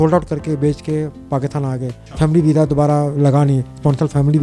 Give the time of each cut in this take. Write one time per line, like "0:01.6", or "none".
0:02.0